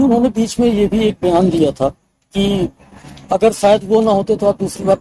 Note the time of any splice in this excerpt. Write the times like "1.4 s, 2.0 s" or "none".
none